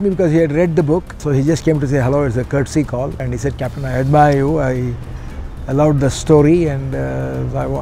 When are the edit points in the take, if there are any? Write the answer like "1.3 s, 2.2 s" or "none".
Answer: 1.2 s, 3.2 s